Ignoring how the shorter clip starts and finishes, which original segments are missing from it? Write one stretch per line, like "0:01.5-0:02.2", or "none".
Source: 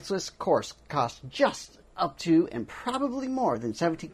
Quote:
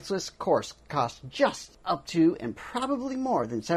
0:01.7-0:01.8